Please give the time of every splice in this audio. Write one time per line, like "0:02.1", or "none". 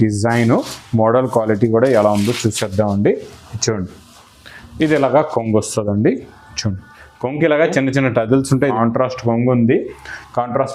0:08.7